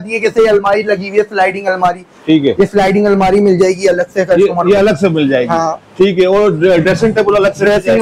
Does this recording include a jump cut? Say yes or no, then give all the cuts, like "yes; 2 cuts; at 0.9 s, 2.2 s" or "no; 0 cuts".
no; 0 cuts